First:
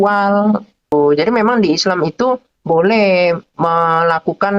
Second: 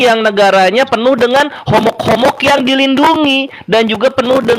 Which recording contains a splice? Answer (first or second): first